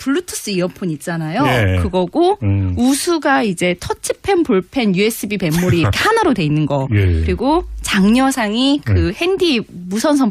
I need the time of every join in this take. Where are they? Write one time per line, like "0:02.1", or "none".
none